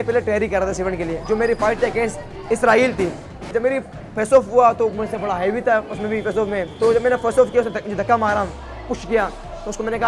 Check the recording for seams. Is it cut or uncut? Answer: cut